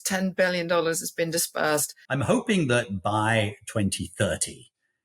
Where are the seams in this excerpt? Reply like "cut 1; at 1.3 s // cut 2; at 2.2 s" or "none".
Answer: cut 1; at 2.0 s